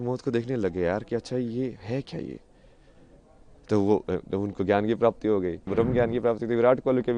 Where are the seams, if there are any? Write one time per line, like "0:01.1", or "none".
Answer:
0:05.6